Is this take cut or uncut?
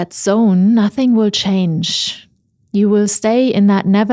uncut